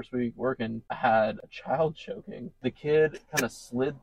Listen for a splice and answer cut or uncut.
cut